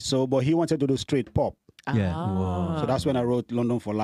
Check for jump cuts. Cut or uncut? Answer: uncut